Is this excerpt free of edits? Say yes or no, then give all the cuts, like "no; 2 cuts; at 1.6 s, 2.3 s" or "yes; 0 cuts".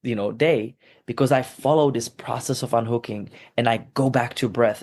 yes; 0 cuts